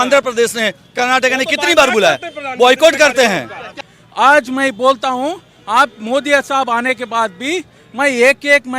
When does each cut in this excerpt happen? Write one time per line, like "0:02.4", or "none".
0:03.8